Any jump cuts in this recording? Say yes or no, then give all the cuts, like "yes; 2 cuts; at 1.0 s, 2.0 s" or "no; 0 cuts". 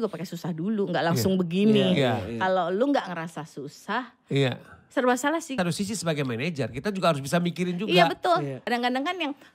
yes; 2 cuts; at 5.6 s, 8.6 s